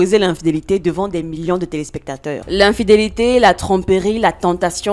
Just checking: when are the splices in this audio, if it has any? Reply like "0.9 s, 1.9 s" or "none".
2.4 s